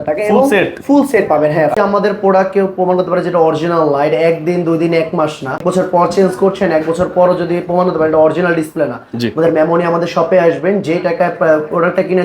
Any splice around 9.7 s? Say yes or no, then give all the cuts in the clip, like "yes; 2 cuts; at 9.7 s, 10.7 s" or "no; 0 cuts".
no; 2 cuts; at 1.7 s, 5.6 s